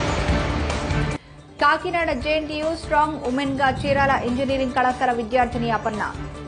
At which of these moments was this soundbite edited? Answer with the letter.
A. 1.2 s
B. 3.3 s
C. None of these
A